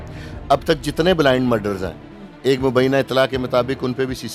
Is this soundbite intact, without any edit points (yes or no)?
yes